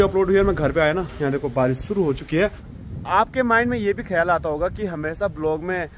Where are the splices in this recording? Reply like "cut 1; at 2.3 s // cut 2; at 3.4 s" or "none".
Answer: cut 1; at 2.7 s